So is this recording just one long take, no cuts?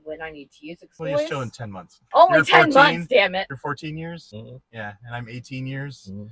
no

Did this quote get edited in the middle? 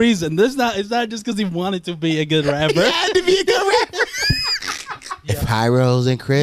yes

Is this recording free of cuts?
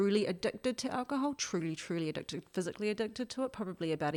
yes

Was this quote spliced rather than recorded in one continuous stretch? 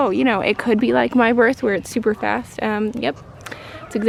no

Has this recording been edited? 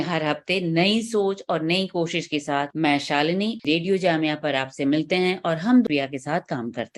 yes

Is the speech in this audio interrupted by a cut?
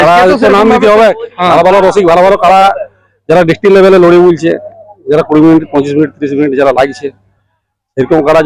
no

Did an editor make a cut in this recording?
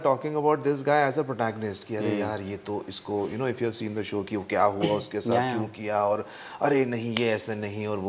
no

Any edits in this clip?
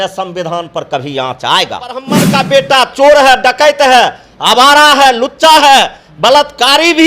yes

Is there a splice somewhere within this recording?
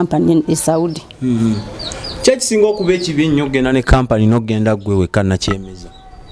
no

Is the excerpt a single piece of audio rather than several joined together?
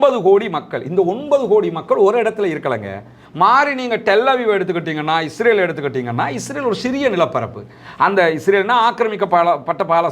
no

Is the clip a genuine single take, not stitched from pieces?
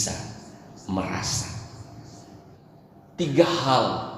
no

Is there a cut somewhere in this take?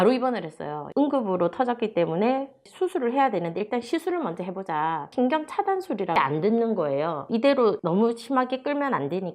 yes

